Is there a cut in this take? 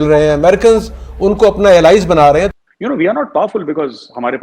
yes; 1 cut; at 2.5 s

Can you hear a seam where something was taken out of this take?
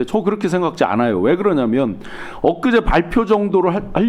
no; 0 cuts

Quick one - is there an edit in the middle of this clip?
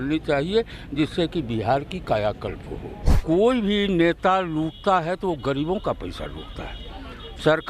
yes; 1 cut; at 3.2 s

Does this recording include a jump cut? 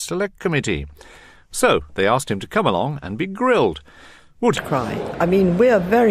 no; 0 cuts

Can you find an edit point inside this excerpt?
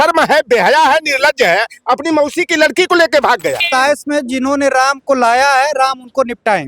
yes; 1 cut; at 3.6 s

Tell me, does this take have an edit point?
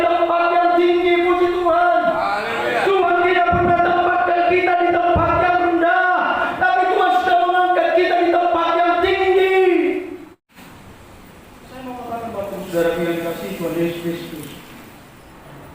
yes; 1 cut; at 10.5 s

